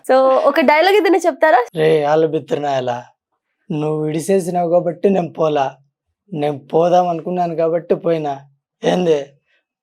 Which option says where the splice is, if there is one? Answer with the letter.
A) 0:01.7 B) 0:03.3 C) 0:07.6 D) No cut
A